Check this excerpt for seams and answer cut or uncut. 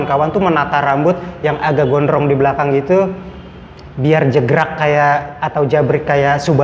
uncut